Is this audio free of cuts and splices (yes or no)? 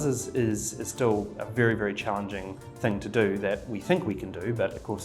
yes